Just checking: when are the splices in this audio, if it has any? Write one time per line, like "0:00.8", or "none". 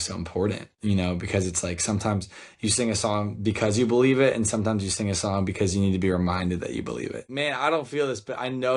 0:07.2